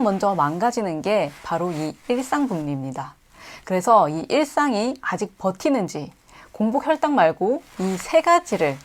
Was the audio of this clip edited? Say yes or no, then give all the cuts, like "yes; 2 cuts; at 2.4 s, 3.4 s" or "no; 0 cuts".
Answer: no; 0 cuts